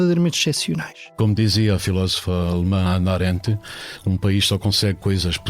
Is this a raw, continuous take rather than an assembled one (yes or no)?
no